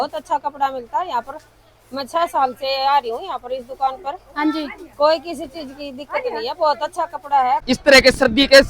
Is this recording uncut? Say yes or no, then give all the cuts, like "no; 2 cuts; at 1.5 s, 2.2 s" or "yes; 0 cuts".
no; 1 cut; at 7.6 s